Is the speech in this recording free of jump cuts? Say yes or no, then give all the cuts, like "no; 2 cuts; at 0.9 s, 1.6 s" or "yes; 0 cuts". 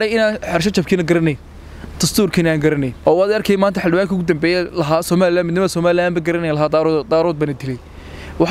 no; 1 cut; at 2.9 s